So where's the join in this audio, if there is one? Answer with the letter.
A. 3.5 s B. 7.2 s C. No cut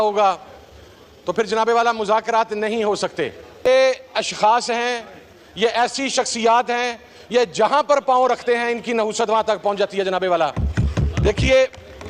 C